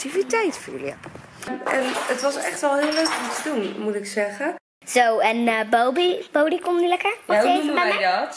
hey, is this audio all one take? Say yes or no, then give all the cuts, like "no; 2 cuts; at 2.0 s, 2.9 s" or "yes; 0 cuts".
no; 2 cuts; at 1.5 s, 4.7 s